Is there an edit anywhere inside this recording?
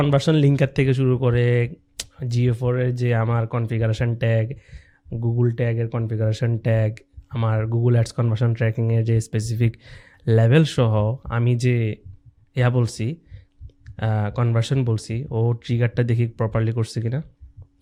no; 0 cuts

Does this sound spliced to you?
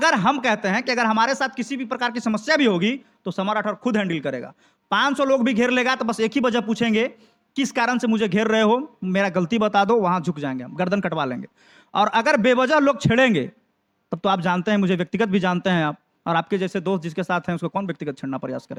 no; 0 cuts

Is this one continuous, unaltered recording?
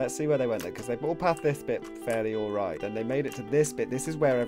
no; 1 cut; at 2.8 s

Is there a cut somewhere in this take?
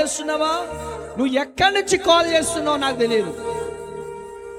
no; 0 cuts

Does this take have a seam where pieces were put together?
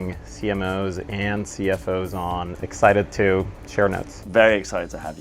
yes; 2 cuts; at 2.6 s, 4.1 s

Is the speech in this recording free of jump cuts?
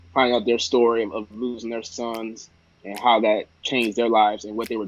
yes; 0 cuts

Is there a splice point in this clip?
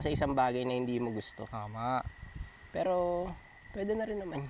no; 0 cuts

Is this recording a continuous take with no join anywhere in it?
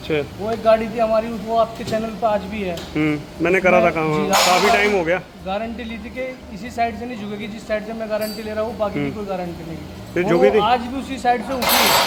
yes; 0 cuts

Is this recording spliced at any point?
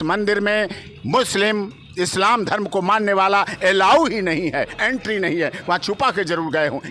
no; 0 cuts

